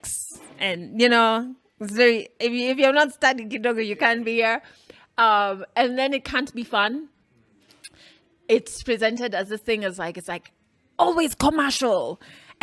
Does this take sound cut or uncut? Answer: uncut